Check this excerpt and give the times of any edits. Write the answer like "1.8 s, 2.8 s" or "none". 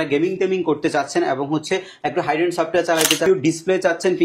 3.2 s